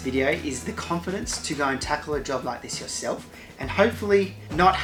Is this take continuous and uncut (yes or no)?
yes